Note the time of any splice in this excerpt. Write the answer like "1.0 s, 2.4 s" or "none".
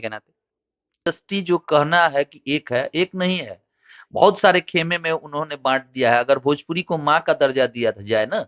1.0 s